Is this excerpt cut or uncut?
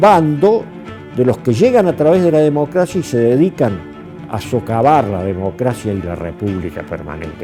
uncut